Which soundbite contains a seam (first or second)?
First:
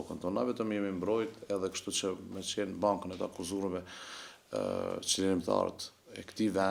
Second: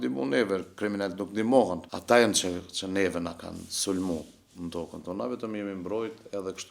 second